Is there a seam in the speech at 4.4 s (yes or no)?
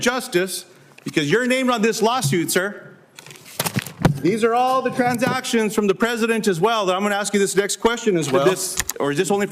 no